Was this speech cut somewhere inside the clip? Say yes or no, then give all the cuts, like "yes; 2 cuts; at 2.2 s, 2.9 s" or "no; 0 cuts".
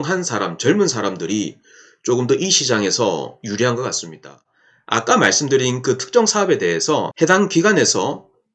yes; 1 cut; at 4.4 s